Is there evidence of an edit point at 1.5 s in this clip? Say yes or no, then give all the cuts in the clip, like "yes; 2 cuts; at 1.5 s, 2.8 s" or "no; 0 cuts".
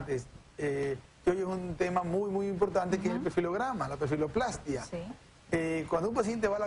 no; 1 cut; at 4.0 s